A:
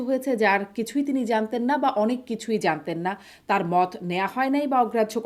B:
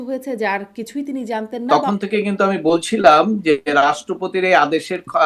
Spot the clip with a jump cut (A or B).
B